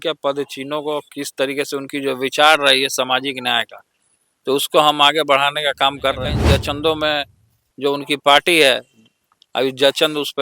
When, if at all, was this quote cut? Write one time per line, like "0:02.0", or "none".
0:06.4